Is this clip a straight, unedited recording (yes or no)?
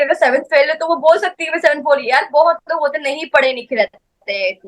yes